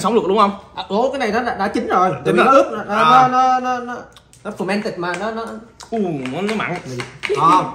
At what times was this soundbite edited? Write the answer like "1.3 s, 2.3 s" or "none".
none